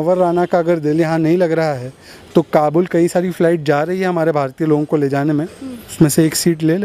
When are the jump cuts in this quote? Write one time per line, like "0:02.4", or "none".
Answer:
0:05.9